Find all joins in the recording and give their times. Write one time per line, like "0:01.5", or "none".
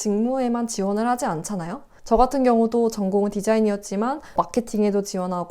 none

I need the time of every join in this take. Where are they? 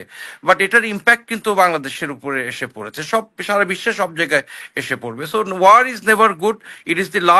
none

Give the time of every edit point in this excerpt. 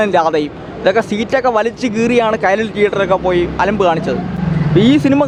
none

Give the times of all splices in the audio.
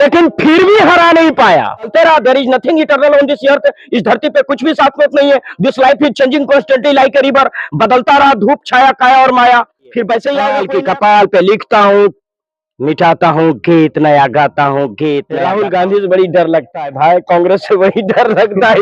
0:01.9
0:10.6
0:15.4

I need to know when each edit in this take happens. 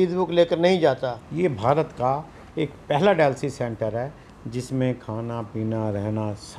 0:01.2

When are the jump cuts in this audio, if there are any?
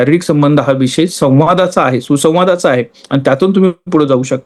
none

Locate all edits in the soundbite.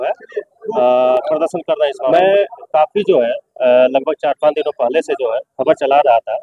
0:02.1

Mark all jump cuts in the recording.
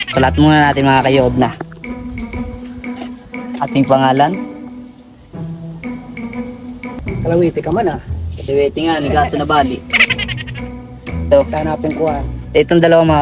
0:07.0

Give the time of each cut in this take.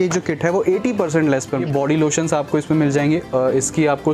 0:01.6

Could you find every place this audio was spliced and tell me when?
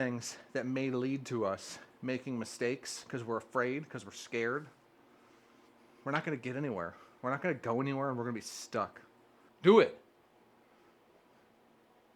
none

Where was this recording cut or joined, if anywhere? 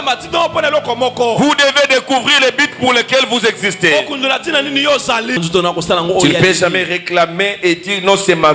0:05.4

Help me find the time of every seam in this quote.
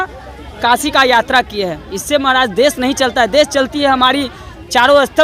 none

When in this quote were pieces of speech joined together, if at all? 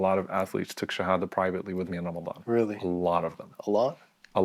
none

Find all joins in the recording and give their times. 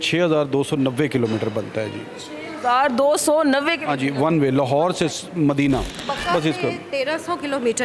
0:06.0

